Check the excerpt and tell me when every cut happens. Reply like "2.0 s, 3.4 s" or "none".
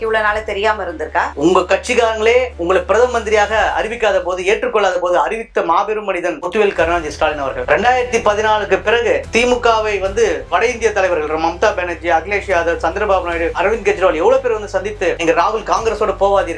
1.3 s, 9.3 s, 10.5 s